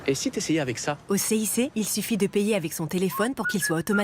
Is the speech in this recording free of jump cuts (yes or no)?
no